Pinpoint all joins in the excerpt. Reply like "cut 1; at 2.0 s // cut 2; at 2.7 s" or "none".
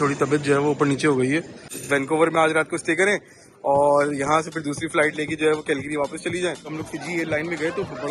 cut 1; at 1.8 s // cut 2; at 6.8 s